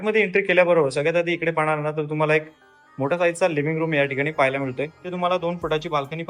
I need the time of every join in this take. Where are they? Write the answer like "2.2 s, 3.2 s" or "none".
4.9 s